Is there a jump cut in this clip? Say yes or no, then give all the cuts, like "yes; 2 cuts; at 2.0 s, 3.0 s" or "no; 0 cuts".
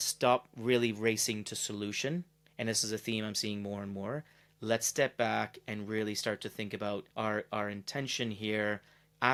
no; 0 cuts